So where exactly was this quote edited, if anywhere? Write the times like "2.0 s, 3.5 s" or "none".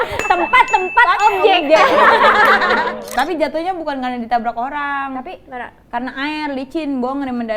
3.1 s